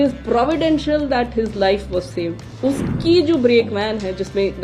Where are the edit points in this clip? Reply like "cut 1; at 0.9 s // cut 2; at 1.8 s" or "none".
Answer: cut 1; at 2.5 s